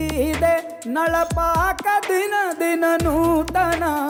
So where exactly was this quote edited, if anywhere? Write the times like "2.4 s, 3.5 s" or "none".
none